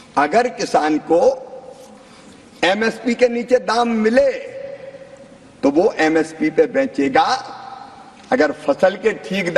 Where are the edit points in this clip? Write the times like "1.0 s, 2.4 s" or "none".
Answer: none